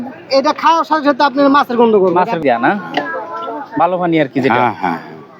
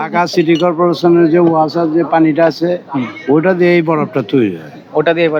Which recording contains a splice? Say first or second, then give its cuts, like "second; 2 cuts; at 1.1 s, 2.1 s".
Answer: first; 1 cut; at 2.4 s